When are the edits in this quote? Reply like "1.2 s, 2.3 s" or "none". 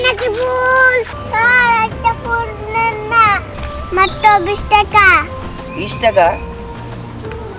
1.2 s